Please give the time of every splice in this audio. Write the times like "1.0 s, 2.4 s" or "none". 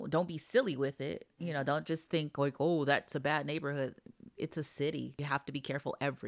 5.2 s